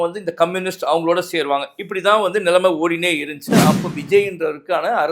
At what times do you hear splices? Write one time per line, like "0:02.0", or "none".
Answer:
0:03.5